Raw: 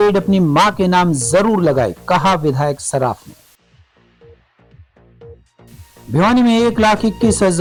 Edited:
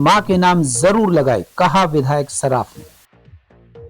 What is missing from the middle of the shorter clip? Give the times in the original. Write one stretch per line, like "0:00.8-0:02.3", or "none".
0:03.5-0:04.4